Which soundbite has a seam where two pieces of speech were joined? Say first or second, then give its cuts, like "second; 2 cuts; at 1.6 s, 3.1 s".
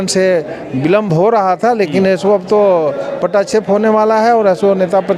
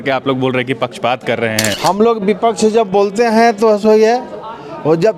second; 1 cut; at 1.7 s